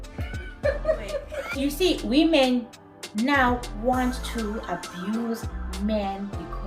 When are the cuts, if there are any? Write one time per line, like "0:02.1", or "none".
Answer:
0:01.4

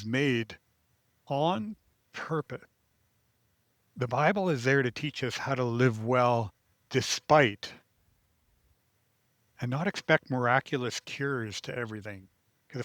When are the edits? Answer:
0:03.8

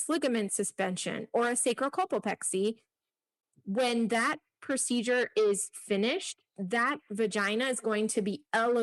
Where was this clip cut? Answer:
none

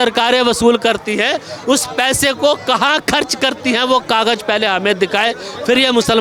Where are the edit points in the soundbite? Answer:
none

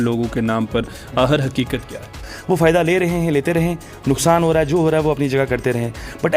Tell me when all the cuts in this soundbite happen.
0:02.1

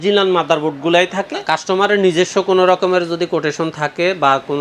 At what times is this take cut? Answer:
0:01.4

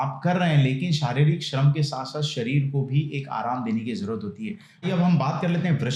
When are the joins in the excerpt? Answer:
0:04.8

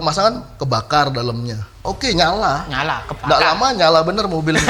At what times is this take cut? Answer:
0:01.8

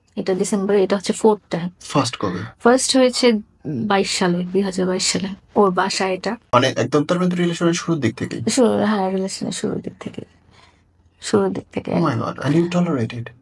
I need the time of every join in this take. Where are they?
none

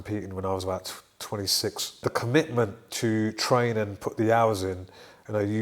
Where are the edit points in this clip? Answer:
0:02.0

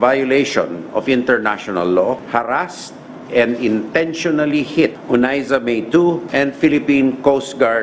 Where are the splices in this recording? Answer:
0:02.2
0:05.0
0:06.2

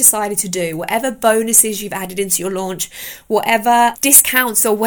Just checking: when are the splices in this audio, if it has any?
0:04.0

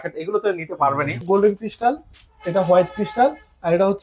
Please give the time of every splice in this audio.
0:01.2

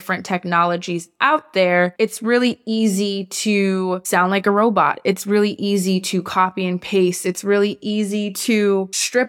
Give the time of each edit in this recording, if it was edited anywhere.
0:01.9

